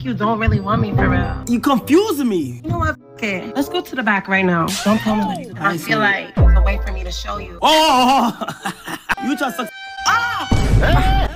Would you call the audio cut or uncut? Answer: cut